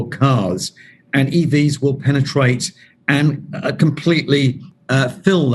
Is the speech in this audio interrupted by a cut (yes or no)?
no